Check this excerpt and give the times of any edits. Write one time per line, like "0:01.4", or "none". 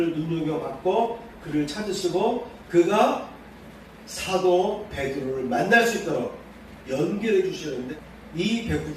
0:07.9